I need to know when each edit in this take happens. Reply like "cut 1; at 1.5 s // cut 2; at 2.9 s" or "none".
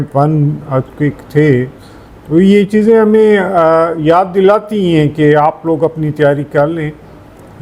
none

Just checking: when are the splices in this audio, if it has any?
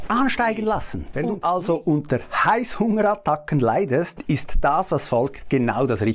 cut 1; at 1.0 s

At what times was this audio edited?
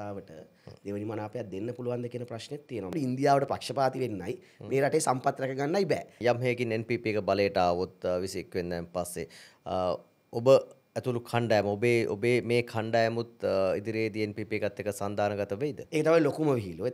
cut 1; at 2.9 s // cut 2; at 6.2 s // cut 3; at 15.8 s

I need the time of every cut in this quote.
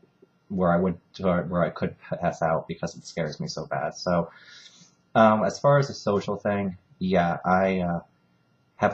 cut 1; at 1.1 s

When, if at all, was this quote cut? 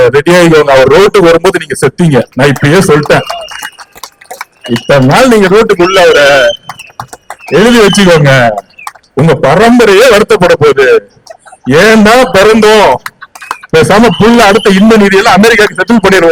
none

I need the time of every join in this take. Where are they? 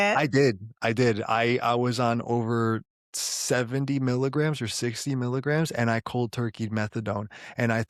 none

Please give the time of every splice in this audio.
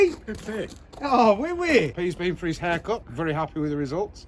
cut 1; at 3.1 s

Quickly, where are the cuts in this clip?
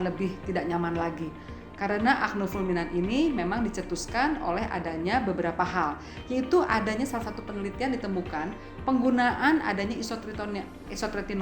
cut 1; at 1.6 s

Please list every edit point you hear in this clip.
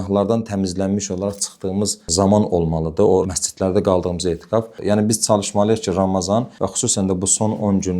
cut 1; at 4.7 s

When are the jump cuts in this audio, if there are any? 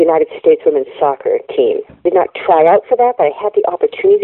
cut 1; at 2.0 s

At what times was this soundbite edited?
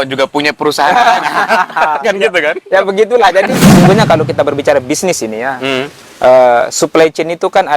cut 1; at 3.8 s

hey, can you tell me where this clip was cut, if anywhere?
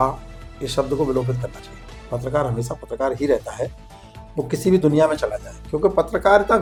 none

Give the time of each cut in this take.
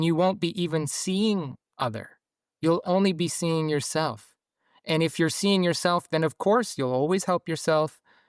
none

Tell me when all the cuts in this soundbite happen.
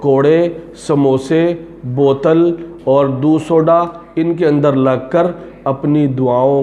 none

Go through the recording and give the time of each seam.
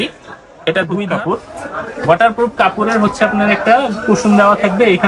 cut 1; at 1.0 s

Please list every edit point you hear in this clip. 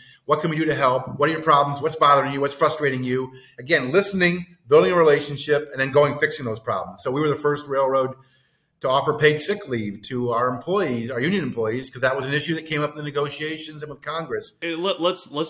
cut 1; at 14.6 s

